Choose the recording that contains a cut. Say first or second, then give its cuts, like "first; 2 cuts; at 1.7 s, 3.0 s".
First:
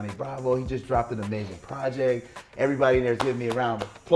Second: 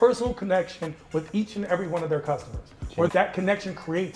second; 1 cut; at 3.1 s